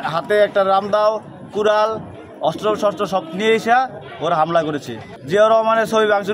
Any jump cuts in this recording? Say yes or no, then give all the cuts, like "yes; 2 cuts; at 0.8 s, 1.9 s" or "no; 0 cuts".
no; 0 cuts